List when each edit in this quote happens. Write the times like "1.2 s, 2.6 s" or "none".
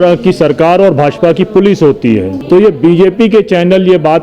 2.3 s